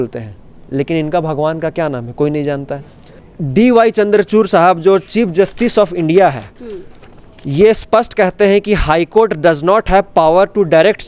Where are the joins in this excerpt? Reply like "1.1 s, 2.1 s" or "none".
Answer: 3.3 s

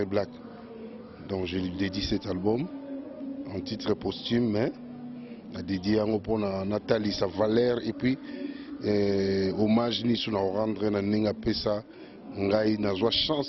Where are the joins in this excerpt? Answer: none

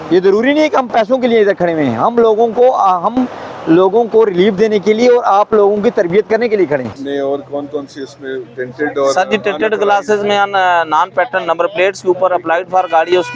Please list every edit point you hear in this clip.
none

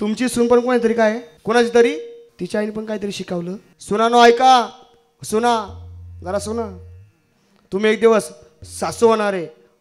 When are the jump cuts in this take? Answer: 1.3 s, 2.2 s, 3.7 s

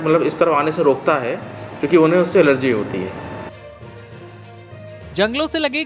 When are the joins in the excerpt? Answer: 3.5 s, 5.1 s

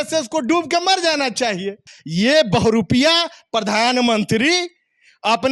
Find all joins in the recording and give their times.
1.9 s

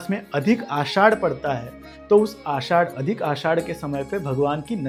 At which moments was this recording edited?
none

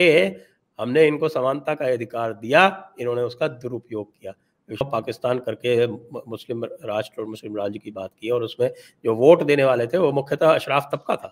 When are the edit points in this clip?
4.8 s

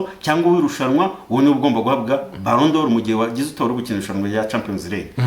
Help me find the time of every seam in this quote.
none

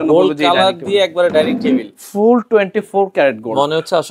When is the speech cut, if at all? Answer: none

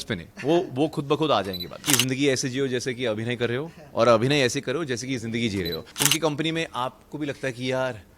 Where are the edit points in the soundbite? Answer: 1.8 s, 5.9 s

